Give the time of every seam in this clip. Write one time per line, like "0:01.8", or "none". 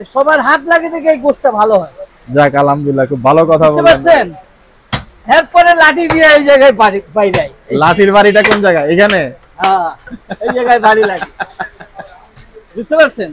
none